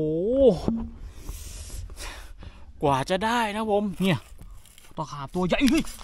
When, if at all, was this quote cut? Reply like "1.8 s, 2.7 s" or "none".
3.9 s